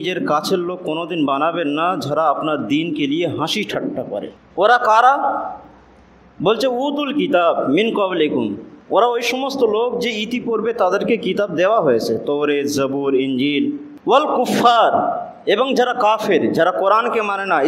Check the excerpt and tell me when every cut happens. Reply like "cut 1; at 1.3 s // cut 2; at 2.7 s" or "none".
cut 1; at 4.3 s